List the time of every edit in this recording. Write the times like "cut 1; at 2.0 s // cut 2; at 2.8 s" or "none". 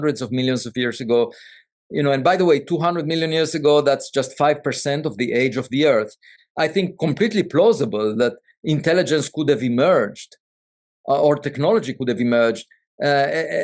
cut 1; at 6.3 s